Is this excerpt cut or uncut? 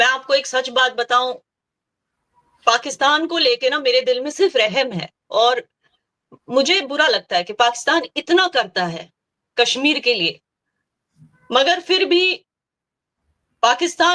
uncut